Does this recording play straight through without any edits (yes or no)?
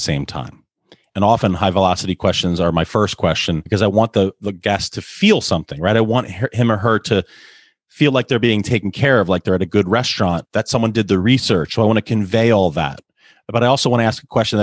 no